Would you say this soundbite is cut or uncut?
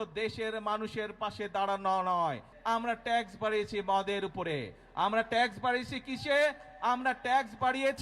cut